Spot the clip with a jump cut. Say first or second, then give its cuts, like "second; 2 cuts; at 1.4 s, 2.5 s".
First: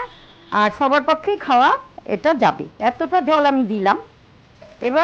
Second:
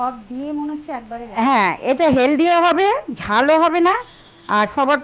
first; 1 cut; at 2.7 s